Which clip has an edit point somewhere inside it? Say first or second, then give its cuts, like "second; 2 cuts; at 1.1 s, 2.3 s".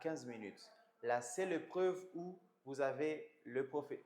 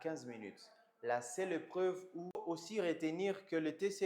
second; 1 cut; at 2.4 s